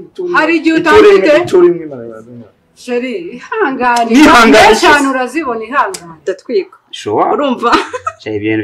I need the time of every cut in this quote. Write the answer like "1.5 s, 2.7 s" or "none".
6.3 s